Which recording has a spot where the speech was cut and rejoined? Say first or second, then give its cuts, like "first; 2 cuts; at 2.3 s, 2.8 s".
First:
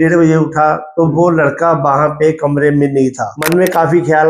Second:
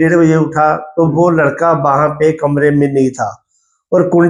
first; 1 cut; at 3.3 s